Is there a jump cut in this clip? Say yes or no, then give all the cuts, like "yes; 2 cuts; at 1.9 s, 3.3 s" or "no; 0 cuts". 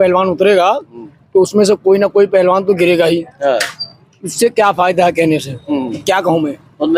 no; 0 cuts